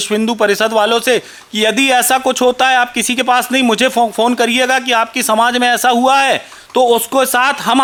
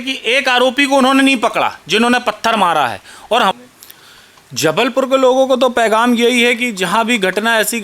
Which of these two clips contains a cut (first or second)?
second